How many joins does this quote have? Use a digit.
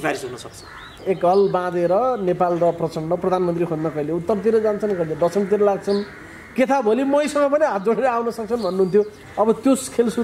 1